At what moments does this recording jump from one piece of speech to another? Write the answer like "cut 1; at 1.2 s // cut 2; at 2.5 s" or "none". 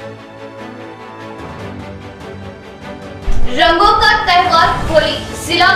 cut 1; at 1.0 s